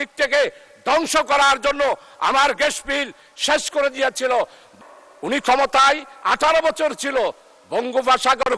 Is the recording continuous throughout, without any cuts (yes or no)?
no